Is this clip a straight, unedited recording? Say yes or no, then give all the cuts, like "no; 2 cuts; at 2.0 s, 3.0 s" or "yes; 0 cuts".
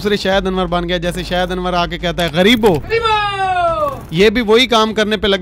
yes; 0 cuts